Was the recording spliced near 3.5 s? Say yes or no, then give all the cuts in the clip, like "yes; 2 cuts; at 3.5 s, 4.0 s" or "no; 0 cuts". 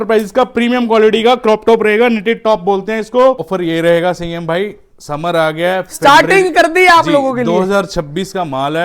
yes; 1 cut; at 3.5 s